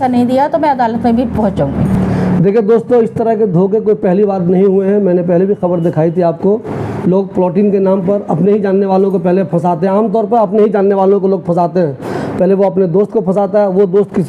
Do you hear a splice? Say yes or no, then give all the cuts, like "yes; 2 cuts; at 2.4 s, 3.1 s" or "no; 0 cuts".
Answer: no; 0 cuts